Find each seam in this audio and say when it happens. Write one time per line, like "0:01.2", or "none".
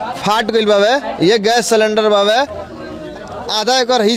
none